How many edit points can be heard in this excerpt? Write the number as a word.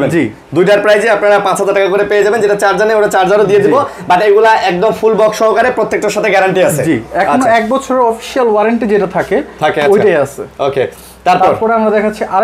zero